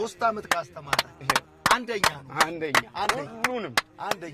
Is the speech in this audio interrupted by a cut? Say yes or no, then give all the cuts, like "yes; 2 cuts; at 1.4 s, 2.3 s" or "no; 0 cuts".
no; 0 cuts